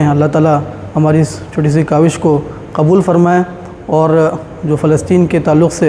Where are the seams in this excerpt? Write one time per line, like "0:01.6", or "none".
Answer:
none